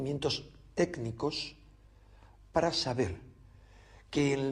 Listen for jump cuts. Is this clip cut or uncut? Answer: uncut